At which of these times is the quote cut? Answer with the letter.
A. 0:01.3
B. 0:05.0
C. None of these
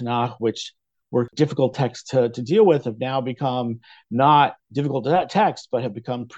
A